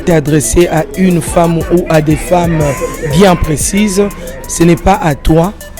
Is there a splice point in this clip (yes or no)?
no